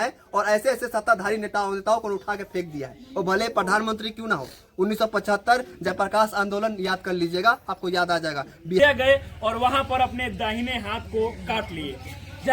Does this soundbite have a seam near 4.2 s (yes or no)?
no